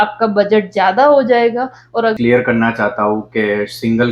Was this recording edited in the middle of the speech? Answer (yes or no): yes